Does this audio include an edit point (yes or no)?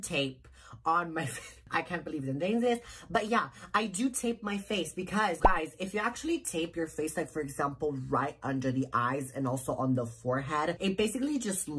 no